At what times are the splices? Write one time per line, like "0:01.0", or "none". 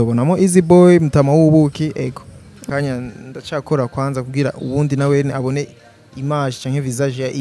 0:02.7